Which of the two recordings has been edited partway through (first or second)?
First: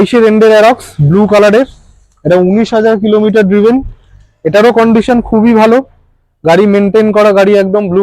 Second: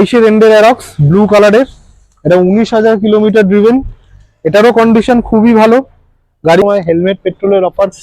second